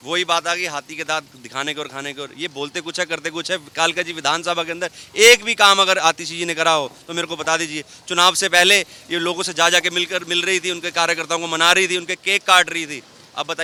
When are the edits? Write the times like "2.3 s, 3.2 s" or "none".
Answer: none